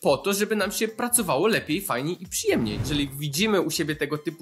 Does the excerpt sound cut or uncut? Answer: cut